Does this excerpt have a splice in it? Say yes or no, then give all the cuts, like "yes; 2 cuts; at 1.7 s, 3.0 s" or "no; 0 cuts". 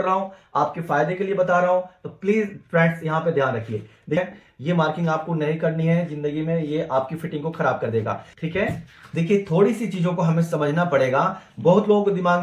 yes; 2 cuts; at 4.2 s, 8.3 s